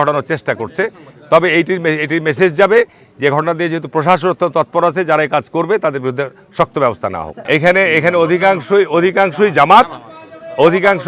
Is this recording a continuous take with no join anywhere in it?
no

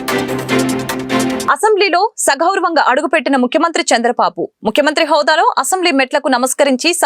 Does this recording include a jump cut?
yes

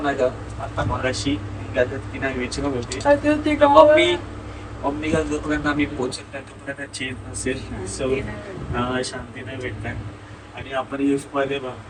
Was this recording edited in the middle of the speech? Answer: no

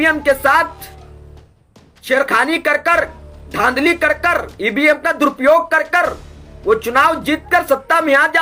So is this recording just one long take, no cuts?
yes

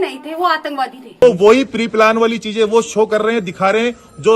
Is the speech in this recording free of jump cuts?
no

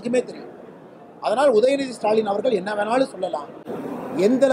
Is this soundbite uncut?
no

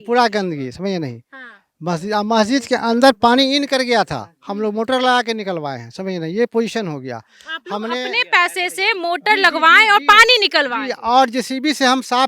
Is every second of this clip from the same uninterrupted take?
yes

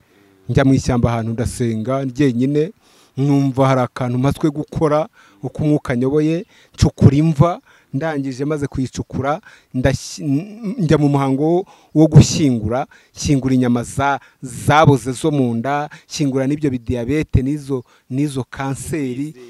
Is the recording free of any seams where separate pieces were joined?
yes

